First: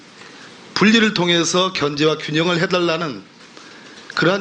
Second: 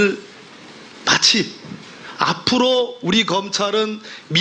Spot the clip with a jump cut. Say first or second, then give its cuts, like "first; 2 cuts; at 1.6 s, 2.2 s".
second; 1 cut; at 3.4 s